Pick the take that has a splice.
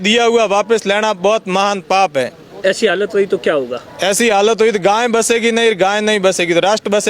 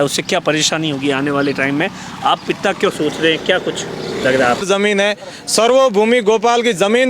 second; 1 cut; at 4.6 s

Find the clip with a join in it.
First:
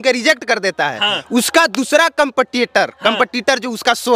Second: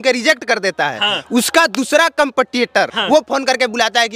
second; 1 cut; at 2.9 s

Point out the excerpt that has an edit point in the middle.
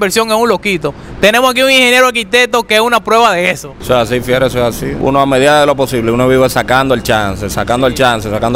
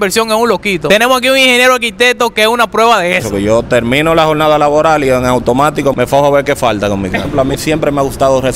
second; 4 cuts; at 0.8 s, 3.3 s, 5.9 s, 7.3 s

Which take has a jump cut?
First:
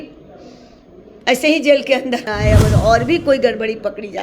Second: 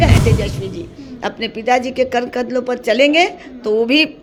first; 1 cut; at 2.3 s

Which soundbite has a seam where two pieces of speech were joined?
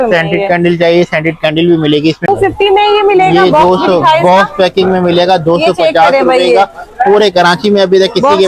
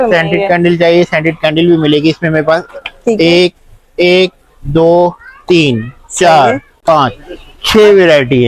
first; 1 cut; at 2.3 s

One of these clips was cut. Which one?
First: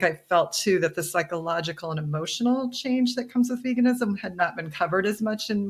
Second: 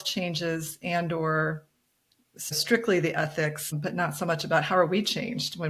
second; 2 cuts; at 2.6 s, 3.7 s

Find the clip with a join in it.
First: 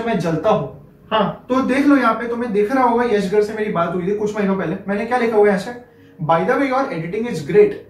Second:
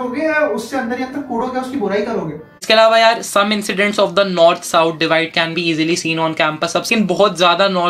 second; 1 cut; at 2.6 s

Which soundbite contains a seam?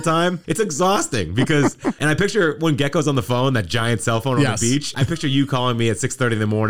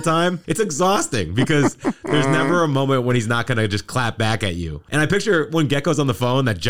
first; 2 cuts; at 2.0 s, 4.9 s

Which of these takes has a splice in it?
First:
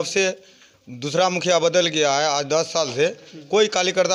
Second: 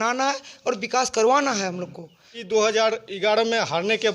second; 1 cut; at 2.4 s

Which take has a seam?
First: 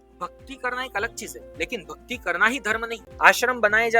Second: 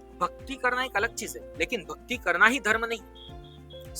first; 1 cut; at 3.0 s

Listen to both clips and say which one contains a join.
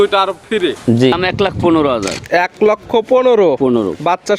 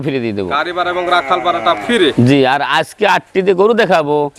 first; 1 cut; at 1.1 s

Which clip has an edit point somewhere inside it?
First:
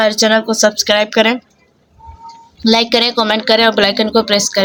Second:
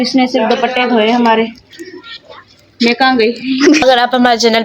second; 1 cut; at 3.6 s

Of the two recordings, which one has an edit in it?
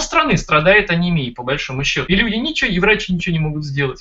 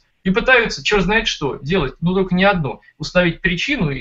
first; 1 cut; at 2.0 s

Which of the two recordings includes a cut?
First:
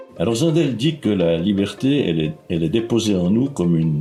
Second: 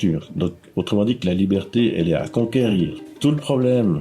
second; 1 cut; at 3.0 s

